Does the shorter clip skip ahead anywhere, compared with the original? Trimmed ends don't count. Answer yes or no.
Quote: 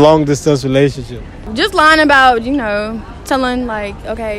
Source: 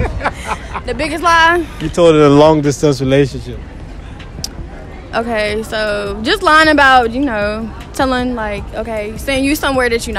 yes